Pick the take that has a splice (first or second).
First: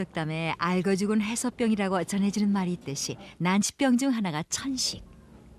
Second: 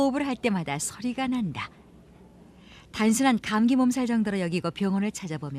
first